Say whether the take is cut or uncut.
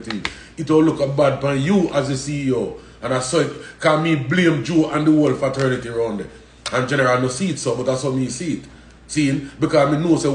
uncut